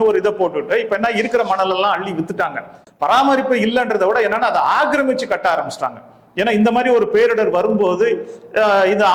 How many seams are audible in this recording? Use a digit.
1